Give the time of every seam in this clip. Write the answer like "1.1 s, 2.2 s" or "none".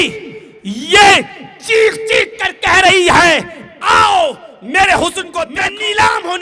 5.4 s

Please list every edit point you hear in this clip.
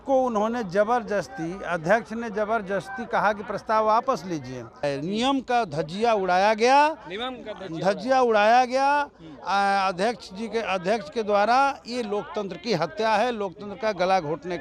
4.8 s

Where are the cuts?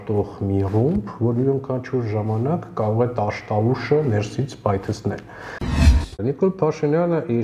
5.7 s

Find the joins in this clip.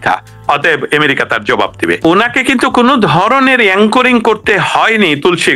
2.0 s

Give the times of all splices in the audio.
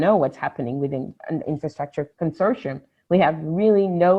1.5 s

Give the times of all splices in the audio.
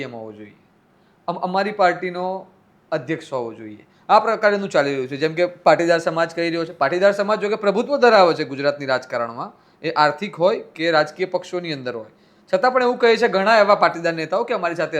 none

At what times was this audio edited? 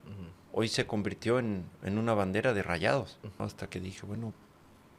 3.4 s

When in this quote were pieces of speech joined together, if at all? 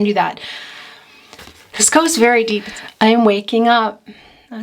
2.7 s

